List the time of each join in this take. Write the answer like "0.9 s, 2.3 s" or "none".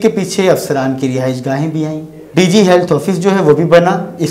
2.1 s